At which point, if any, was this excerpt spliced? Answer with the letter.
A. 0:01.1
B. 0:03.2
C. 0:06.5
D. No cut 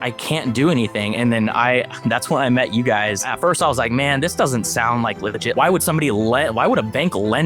B